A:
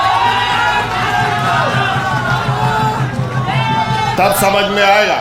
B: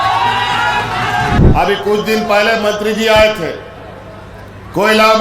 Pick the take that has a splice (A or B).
B